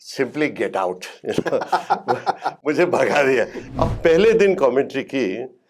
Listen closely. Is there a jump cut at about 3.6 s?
yes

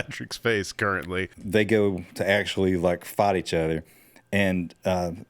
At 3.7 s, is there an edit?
no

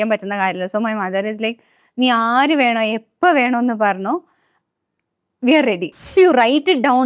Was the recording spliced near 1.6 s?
no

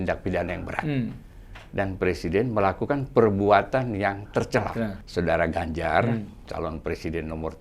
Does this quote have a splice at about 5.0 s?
yes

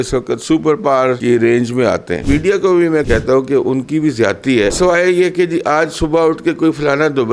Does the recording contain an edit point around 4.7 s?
yes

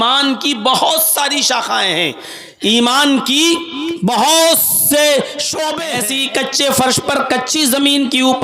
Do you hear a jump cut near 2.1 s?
no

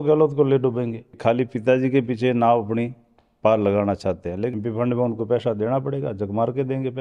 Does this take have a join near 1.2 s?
yes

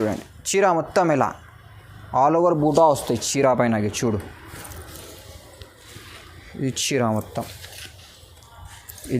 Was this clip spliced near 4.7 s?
no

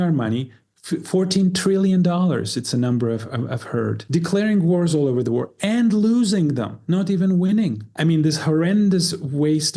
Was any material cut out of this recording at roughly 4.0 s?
yes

